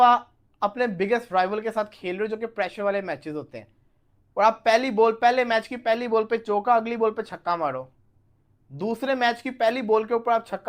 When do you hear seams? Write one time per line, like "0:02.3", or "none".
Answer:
none

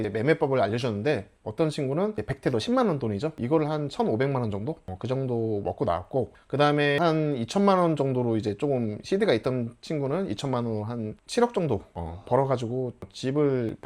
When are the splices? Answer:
0:01.4
0:03.4
0:07.0

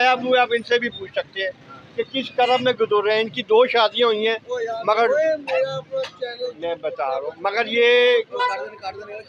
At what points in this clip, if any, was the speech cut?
none

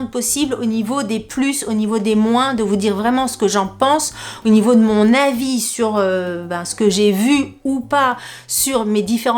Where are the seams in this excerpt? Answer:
none

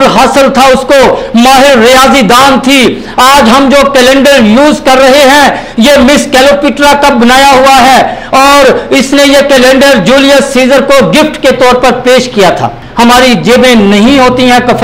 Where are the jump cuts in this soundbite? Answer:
0:12.8

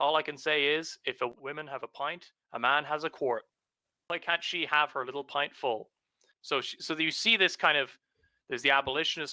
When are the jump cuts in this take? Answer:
0:01.3
0:04.0
0:06.4

